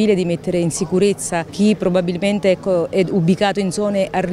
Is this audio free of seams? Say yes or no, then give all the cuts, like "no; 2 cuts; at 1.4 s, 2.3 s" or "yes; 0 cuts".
no; 1 cut; at 1.5 s